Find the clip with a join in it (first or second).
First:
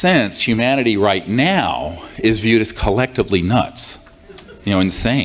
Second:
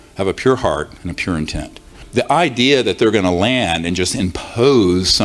second